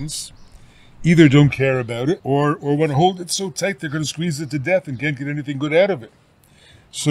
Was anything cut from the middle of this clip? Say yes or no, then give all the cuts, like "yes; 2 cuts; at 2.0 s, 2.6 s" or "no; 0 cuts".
yes; 1 cut; at 2.2 s